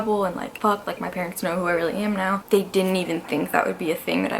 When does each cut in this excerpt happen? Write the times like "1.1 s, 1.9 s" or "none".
2.4 s